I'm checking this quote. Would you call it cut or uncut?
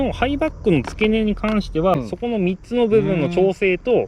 cut